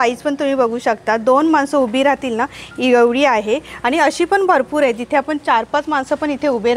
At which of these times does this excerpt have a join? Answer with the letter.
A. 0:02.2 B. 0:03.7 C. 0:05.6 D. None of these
D